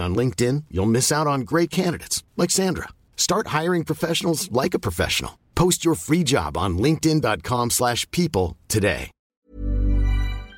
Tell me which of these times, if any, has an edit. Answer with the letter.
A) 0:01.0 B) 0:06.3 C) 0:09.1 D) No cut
C